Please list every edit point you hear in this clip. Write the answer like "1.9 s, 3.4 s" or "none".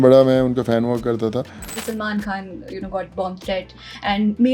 1.7 s